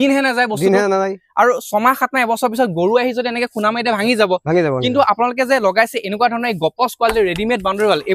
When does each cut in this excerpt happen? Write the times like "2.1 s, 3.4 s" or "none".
none